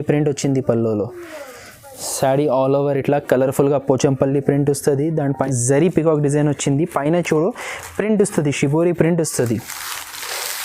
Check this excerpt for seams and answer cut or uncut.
cut